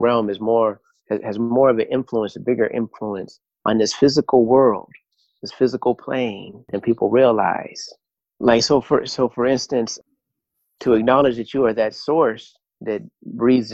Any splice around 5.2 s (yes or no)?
no